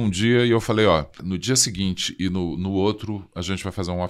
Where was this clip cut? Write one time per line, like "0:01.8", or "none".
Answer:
0:01.2